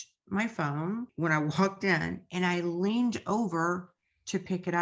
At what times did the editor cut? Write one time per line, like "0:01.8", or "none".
0:01.1